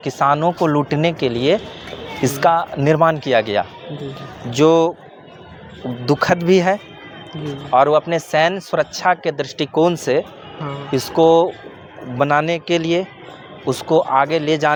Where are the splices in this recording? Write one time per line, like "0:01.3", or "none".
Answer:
none